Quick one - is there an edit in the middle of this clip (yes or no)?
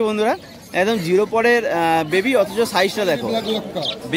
yes